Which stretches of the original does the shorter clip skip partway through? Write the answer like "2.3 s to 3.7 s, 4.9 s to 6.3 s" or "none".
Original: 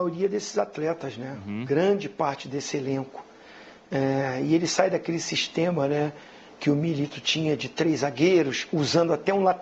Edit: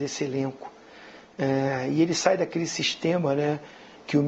none

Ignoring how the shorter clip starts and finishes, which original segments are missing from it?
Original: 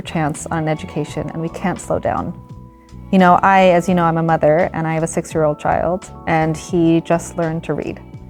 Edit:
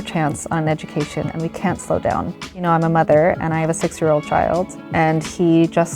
2.6 s to 3.9 s

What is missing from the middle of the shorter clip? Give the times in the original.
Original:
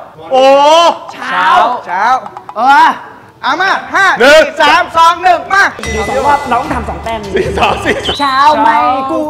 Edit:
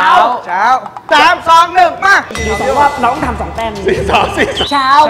2.4 s to 4.5 s

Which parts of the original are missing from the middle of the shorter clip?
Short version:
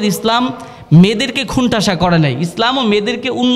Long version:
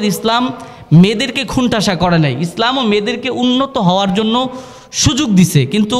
none

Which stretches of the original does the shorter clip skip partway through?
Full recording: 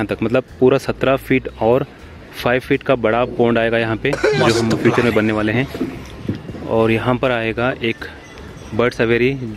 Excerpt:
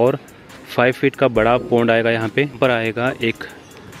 4.2 s to 7.1 s

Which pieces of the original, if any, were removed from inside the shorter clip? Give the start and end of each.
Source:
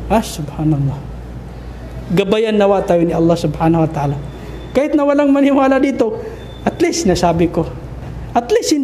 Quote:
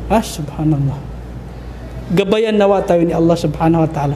none

